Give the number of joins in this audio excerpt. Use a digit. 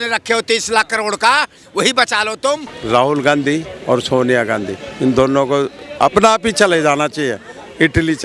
1